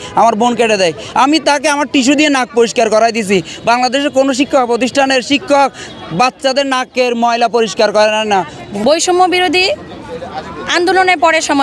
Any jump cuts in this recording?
yes; 1 cut; at 8.8 s

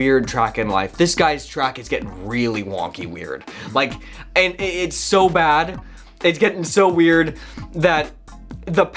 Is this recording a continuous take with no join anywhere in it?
yes; 0 cuts

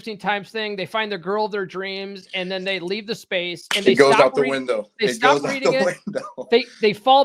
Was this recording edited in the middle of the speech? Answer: no; 0 cuts

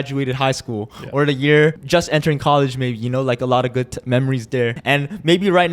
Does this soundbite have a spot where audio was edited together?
yes; 2 cuts; at 1.8 s, 4.8 s

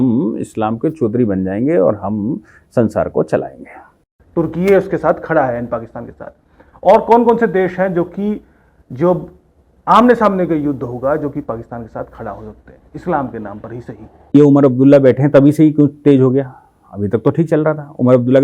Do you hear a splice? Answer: yes; 2 cuts; at 4.2 s, 14.3 s

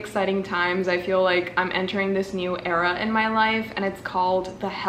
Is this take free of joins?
yes; 0 cuts

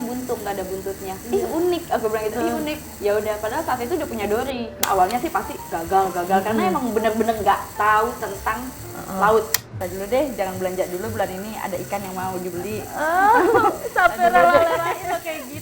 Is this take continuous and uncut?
no; 2 cuts; at 4.8 s, 9.6 s

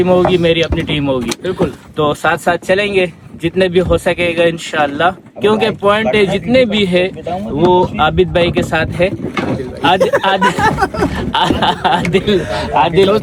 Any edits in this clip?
no; 0 cuts

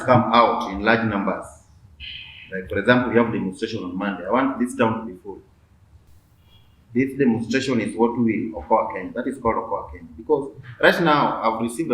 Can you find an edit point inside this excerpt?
no; 0 cuts

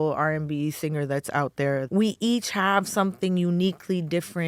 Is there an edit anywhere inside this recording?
yes; 1 cut; at 1.8 s

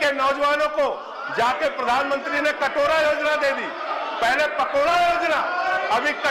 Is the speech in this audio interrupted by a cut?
no; 0 cuts

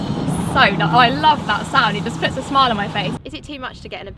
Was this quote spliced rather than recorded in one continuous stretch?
yes; 1 cut; at 3.2 s

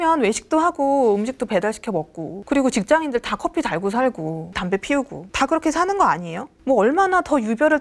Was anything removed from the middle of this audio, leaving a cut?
no; 0 cuts

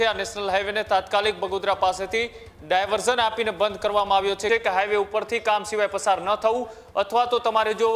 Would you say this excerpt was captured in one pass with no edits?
no; 1 cut; at 4.5 s

